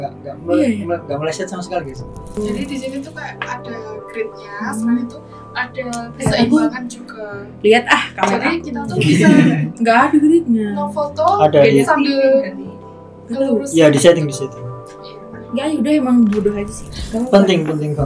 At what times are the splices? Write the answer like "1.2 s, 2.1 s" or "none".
2.4 s, 16.8 s